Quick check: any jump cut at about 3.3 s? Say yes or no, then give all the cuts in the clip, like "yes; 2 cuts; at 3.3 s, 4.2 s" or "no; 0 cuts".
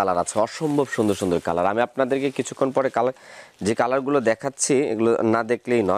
no; 0 cuts